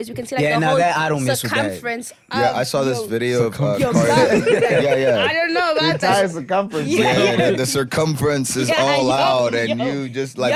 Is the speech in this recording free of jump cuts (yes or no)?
yes